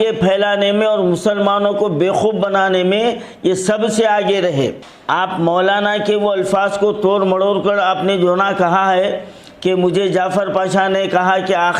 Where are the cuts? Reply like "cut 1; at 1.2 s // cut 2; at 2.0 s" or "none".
cut 1; at 4.9 s